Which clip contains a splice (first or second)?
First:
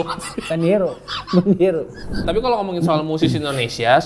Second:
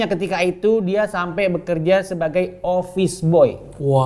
first